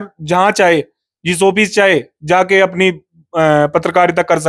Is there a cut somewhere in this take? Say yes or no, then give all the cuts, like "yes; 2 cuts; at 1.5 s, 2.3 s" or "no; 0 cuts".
no; 0 cuts